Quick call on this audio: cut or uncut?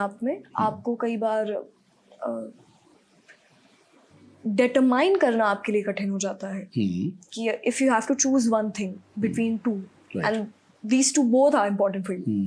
uncut